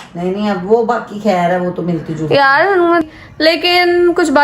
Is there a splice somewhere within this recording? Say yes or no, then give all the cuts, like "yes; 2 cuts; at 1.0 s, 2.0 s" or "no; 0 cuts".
yes; 1 cut; at 3.0 s